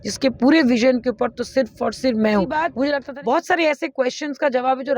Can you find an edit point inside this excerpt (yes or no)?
yes